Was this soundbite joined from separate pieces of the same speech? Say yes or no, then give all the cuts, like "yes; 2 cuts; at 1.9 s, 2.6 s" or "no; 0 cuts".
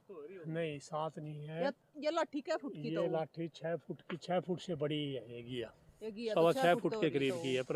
no; 0 cuts